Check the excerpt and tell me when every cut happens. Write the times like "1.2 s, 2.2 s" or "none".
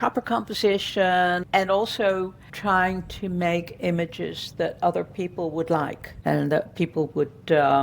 1.4 s